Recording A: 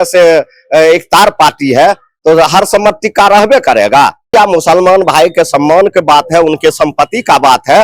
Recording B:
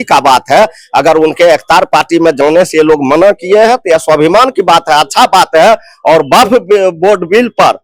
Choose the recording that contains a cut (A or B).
A